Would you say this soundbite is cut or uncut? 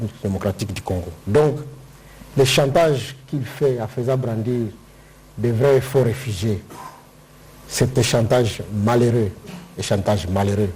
uncut